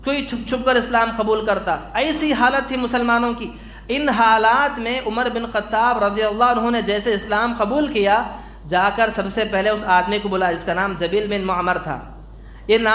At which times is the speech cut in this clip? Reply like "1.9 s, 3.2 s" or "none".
none